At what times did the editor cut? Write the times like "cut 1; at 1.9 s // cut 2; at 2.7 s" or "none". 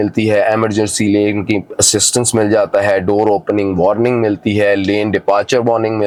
none